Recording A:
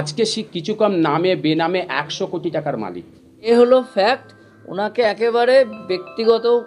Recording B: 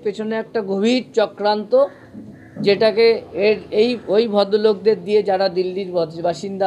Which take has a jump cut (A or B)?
A